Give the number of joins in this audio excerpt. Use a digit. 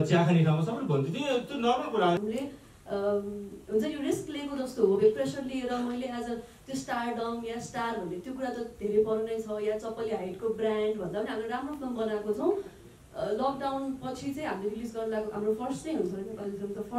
1